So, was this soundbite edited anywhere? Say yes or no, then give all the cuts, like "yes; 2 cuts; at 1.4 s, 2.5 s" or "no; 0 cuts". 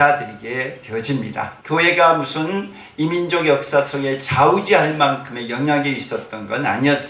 yes; 1 cut; at 1.5 s